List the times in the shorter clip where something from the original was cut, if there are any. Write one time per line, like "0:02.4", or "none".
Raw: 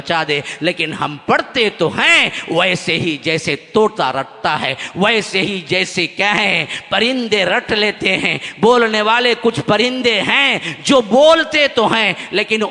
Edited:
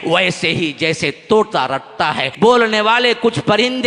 0:02.3

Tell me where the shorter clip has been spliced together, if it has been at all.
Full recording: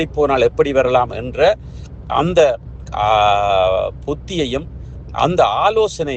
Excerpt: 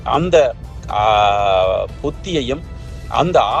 none

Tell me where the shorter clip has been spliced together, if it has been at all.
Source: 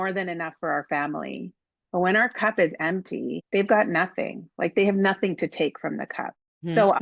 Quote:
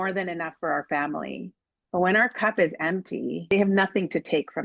0:03.5

